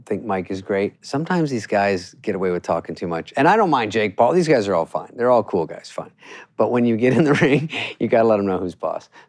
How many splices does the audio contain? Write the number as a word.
two